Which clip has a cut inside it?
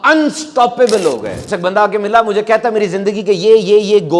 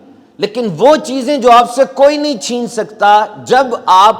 first; 1 cut; at 1.4 s

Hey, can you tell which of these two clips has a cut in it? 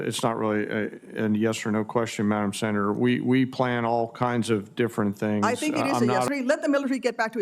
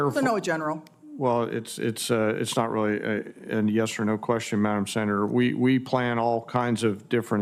first; 1 cut; at 6.3 s

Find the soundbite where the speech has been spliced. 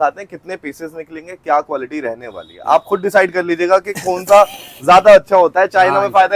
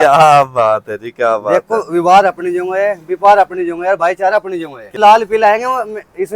second; 1 cut; at 5.0 s

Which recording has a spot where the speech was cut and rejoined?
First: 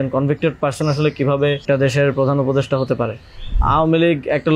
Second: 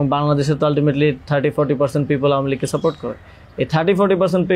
first; 2 cuts; at 1.6 s, 3.6 s

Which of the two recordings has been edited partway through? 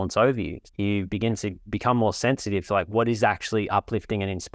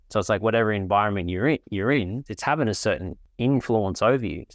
first; 1 cut; at 1.6 s

